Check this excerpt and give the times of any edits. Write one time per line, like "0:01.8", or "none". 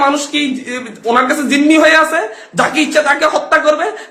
none

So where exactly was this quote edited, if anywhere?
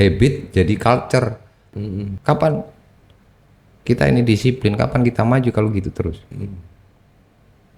0:02.1

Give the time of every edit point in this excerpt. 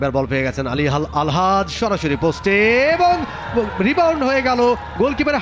none

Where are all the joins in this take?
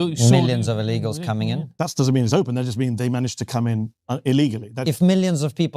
0:04.8

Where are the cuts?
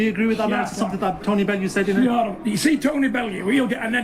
0:01.8

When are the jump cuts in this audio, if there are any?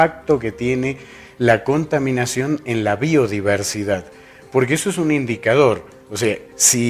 0:04.2

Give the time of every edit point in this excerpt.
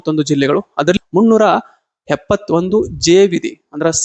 0:01.0

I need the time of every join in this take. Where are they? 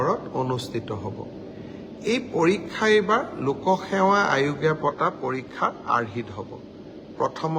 none

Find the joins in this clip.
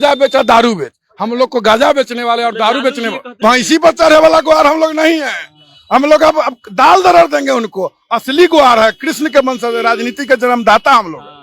0:03.4

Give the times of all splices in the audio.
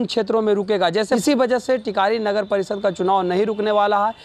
0:01.0

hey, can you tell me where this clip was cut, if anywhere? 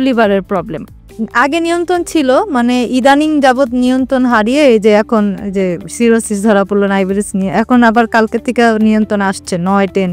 0:01.2

